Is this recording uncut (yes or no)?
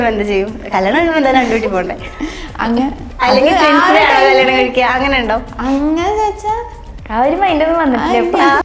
yes